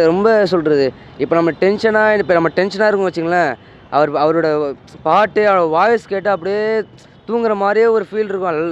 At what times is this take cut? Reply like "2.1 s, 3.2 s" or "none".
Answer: none